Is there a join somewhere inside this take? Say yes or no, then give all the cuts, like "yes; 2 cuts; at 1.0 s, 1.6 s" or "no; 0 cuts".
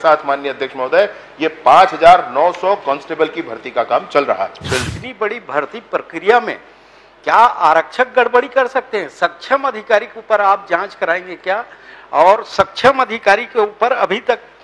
yes; 1 cut; at 4.9 s